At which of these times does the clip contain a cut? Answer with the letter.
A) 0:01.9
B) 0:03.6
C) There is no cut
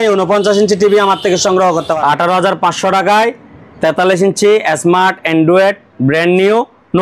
A